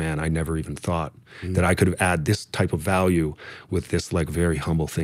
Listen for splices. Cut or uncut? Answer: uncut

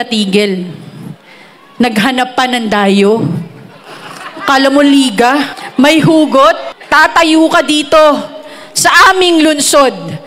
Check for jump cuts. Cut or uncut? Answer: cut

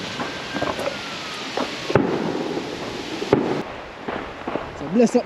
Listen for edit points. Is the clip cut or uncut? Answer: cut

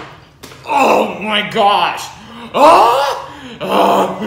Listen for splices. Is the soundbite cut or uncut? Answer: uncut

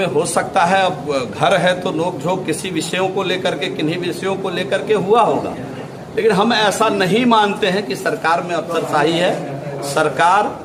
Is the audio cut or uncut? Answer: uncut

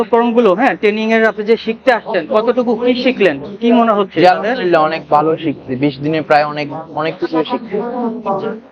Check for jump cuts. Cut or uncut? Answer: uncut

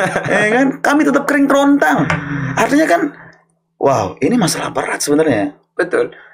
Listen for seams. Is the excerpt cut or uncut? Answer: uncut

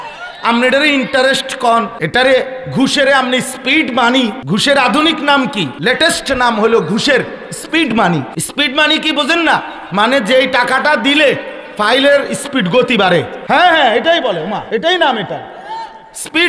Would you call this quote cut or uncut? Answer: cut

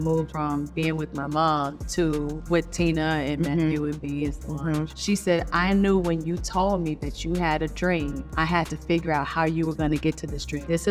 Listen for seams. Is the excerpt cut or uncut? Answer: uncut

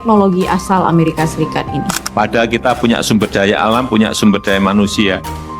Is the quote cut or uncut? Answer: cut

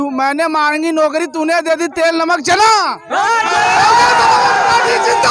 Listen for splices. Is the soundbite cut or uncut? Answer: uncut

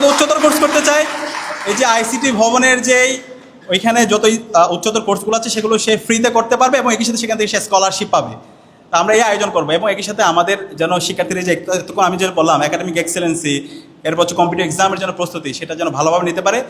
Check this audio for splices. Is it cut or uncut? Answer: uncut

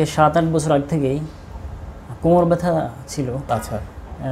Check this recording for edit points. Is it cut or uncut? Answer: cut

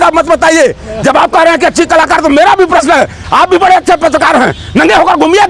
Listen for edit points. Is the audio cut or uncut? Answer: uncut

